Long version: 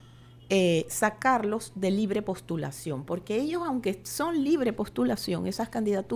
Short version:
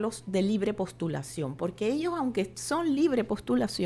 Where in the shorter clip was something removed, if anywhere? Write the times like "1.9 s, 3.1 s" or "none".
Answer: none